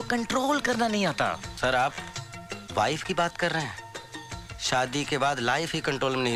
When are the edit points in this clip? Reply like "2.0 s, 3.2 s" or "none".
none